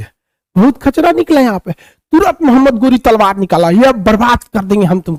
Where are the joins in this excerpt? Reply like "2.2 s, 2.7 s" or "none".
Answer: none